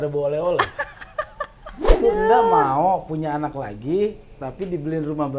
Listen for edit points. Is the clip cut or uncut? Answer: cut